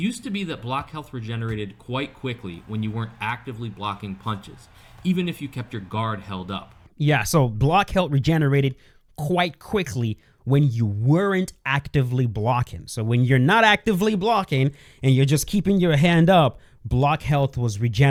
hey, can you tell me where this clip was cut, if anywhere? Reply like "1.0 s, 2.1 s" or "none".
none